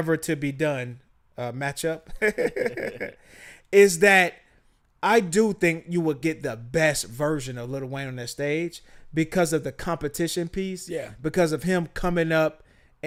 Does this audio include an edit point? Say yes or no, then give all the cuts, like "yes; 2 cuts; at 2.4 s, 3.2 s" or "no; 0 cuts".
no; 0 cuts